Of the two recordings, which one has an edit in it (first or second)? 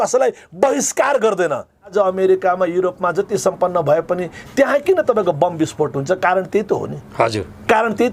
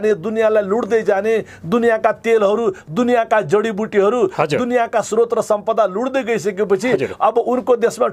first